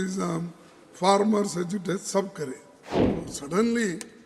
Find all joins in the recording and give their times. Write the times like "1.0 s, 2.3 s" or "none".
3.1 s